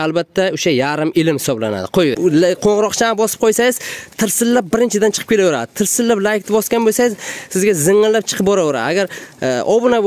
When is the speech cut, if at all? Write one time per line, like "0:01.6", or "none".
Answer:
0:02.2